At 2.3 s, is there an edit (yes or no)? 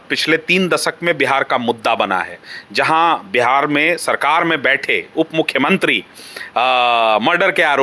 no